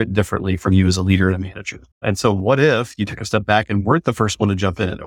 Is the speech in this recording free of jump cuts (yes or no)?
no